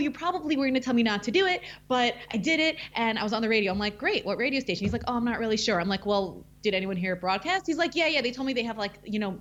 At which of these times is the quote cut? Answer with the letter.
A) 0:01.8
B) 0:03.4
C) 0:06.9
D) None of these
D